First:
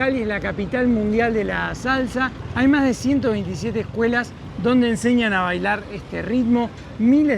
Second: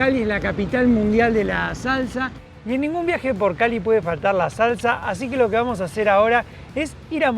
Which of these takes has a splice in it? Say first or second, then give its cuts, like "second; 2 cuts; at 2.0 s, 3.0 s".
second; 1 cut; at 2.4 s